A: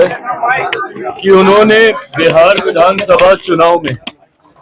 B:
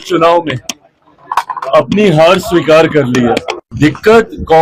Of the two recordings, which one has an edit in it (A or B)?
B